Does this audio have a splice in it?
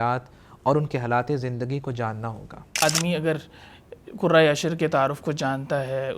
yes; 1 cut; at 2.8 s

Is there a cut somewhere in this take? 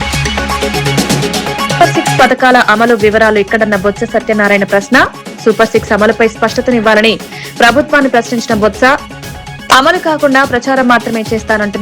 yes; 1 cut; at 1.8 s

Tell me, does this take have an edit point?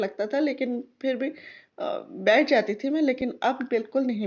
no; 0 cuts

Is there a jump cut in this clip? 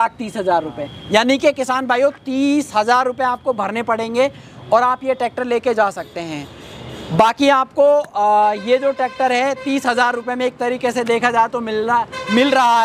no; 0 cuts

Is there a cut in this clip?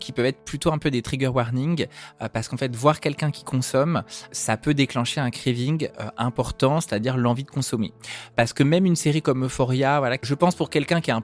yes; 3 cuts; at 4.3 s, 8.3 s, 10.2 s

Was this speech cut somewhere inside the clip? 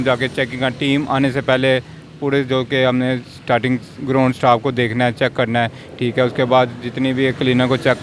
no; 0 cuts

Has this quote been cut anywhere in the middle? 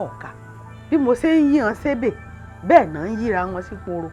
no; 0 cuts

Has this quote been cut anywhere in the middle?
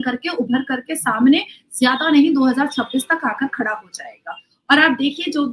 no; 0 cuts

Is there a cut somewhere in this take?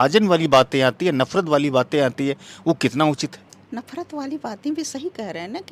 no; 0 cuts

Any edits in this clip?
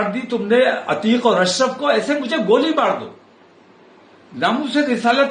no; 0 cuts

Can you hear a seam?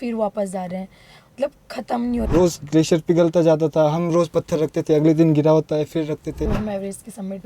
yes; 2 cuts; at 2.2 s, 6.4 s

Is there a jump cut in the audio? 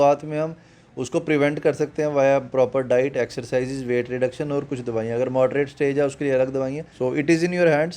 yes; 1 cut; at 6.9 s

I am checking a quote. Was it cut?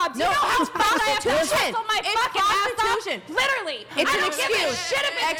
no; 0 cuts

